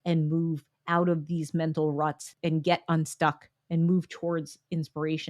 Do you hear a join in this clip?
yes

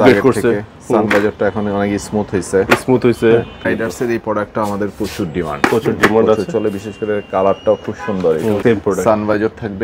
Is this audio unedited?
no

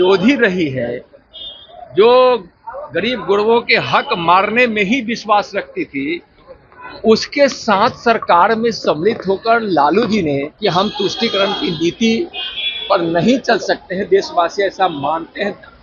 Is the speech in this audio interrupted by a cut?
yes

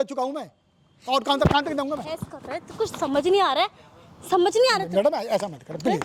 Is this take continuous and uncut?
yes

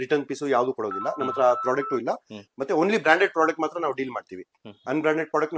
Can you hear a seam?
no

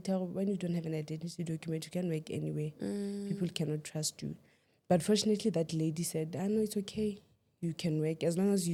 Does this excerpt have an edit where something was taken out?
no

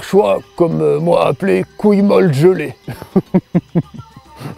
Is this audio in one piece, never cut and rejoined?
yes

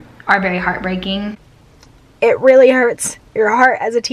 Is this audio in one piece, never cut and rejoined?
no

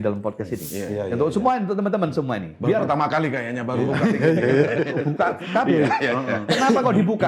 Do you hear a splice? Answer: no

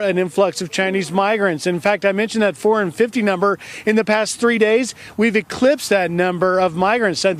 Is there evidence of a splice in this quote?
no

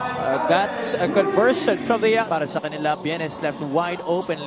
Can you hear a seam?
yes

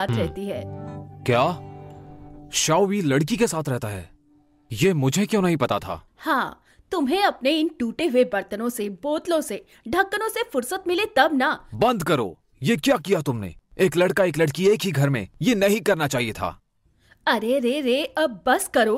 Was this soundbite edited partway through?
no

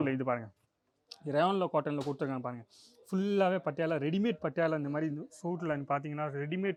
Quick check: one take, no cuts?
yes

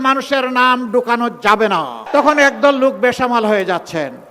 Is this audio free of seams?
no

